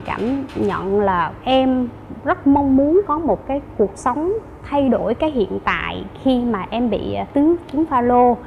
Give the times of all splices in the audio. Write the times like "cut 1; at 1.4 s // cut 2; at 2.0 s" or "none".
none